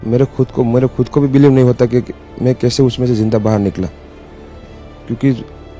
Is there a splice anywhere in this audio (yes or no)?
no